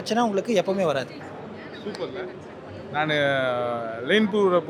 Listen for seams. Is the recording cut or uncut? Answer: uncut